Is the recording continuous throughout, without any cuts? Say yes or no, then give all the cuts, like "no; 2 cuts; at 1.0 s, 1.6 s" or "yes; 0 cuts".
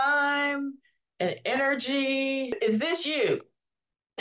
no; 1 cut; at 2.5 s